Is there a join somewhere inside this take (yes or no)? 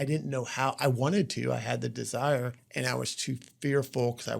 yes